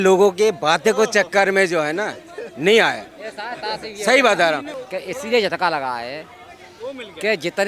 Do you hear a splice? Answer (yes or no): yes